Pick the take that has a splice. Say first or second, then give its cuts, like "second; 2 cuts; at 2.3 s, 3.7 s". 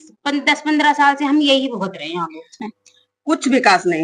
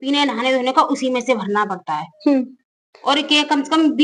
first; 1 cut; at 2.6 s